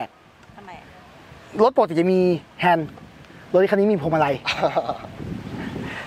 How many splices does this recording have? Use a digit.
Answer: 0